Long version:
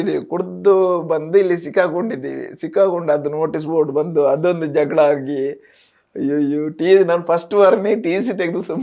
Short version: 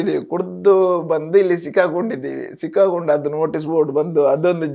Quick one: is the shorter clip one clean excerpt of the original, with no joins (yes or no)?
yes